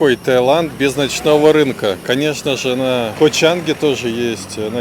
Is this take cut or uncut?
uncut